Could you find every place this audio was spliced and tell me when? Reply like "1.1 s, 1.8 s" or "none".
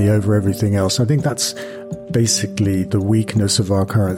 none